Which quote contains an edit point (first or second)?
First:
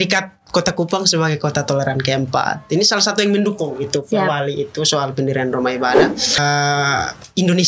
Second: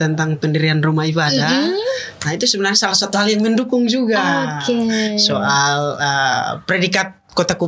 first